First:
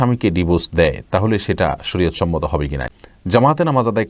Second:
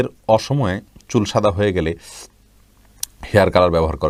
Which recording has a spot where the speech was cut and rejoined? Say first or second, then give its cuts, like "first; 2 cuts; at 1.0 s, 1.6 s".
first; 1 cut; at 2.9 s